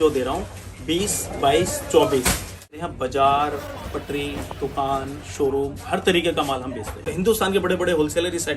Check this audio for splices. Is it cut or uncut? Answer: cut